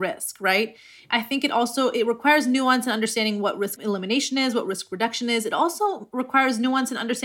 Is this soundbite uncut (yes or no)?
no